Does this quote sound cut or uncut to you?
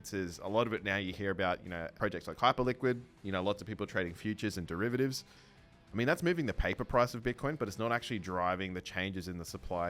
cut